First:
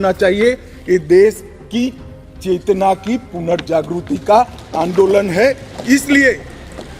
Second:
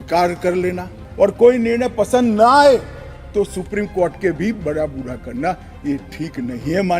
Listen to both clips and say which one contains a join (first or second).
second